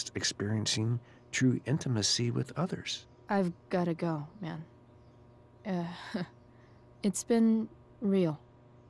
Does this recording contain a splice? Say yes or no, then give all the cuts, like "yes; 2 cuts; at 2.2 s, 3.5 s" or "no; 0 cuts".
yes; 1 cut; at 3.2 s